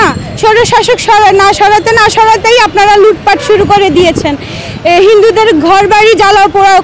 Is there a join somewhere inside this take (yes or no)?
no